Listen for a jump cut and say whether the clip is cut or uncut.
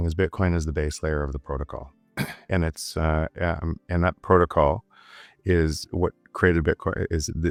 uncut